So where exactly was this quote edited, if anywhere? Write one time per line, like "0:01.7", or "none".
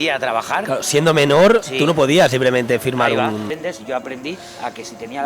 0:03.4